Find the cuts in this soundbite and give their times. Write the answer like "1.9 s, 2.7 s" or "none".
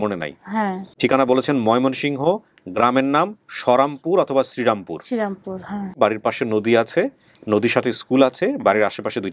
0.9 s, 6.0 s